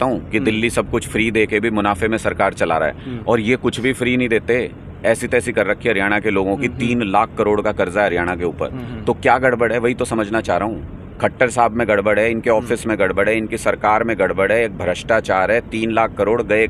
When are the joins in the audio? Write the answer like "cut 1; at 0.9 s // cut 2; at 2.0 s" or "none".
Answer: none